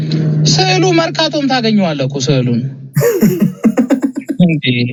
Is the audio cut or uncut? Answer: uncut